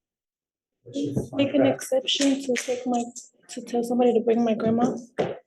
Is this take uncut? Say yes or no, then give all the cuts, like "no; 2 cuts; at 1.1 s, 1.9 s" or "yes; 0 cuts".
yes; 0 cuts